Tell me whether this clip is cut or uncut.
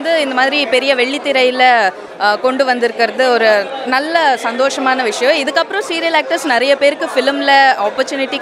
uncut